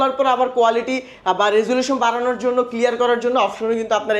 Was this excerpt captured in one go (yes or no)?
yes